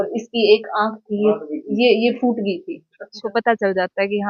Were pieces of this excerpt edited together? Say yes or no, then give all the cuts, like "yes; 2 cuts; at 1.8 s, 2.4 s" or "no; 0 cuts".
yes; 1 cut; at 3.2 s